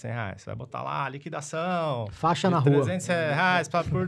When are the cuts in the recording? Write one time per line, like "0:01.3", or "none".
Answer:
none